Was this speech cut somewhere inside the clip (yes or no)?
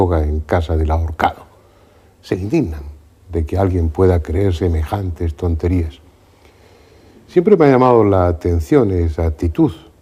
no